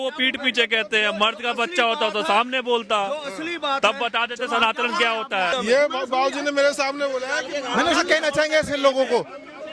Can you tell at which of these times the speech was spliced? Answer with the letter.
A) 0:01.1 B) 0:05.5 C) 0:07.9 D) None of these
B